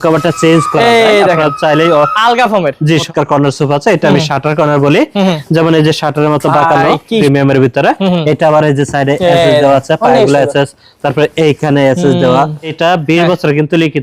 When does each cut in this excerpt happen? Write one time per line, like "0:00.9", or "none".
0:02.9
0:07.2
0:12.8